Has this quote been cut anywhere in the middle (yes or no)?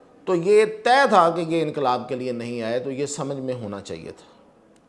no